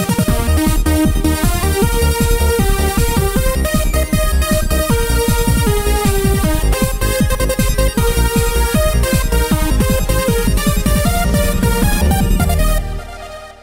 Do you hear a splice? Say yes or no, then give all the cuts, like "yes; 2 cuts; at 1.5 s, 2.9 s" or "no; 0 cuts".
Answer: yes; 1 cut; at 4.3 s